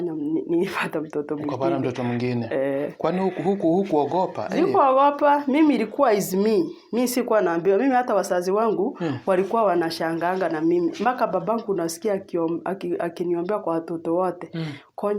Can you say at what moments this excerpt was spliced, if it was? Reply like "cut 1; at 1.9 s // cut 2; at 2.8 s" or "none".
none

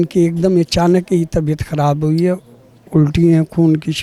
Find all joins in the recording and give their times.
none

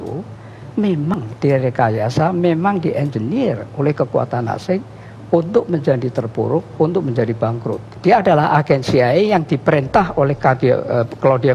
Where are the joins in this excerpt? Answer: cut 1; at 1.1 s // cut 2; at 7.8 s

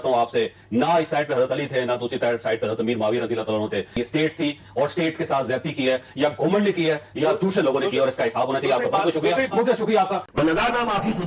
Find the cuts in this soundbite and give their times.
cut 1; at 10.3 s

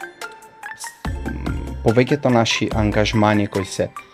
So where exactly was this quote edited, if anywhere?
none

